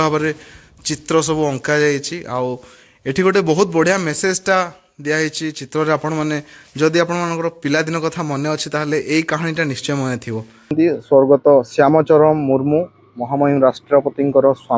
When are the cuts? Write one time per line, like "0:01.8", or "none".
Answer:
0:10.7